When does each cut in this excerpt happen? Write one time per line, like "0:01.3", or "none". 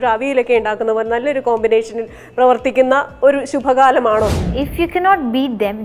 0:04.3

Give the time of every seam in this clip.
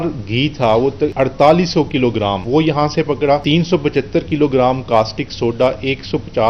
0:01.1
0:02.4
0:03.4

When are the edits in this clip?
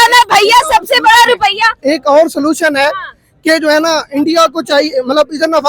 none

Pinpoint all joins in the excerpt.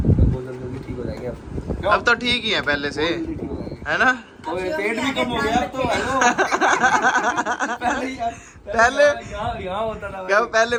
none

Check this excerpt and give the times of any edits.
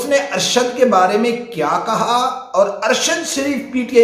none

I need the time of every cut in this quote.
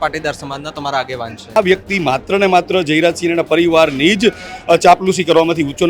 0:01.6

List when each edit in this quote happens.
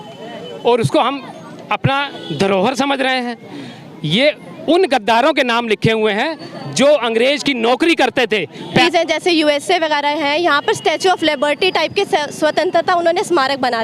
0:08.8

